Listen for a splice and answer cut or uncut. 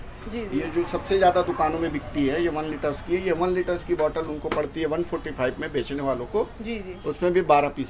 uncut